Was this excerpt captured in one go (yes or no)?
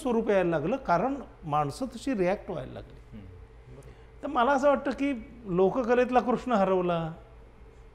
yes